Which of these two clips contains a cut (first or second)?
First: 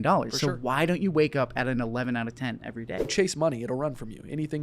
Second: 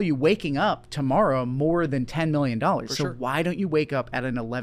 first